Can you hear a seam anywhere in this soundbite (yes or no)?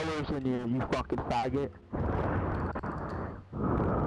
no